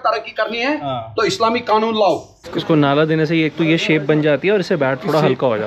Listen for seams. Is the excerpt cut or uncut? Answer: cut